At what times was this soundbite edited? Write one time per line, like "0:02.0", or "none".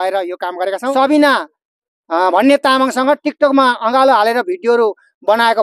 0:00.9

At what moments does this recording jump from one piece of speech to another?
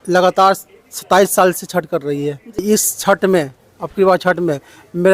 0:02.6

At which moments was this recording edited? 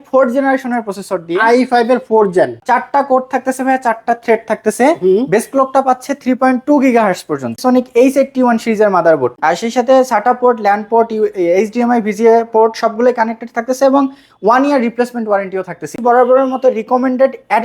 0:02.6
0:07.5
0:09.4
0:15.9

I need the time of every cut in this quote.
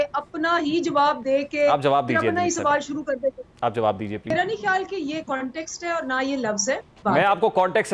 0:04.3
0:07.0

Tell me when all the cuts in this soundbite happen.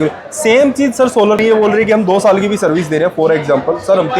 0:01.4

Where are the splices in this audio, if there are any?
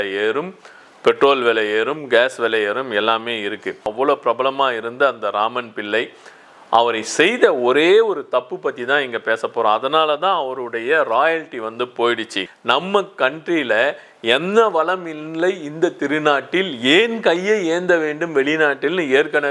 0:03.9
0:12.4

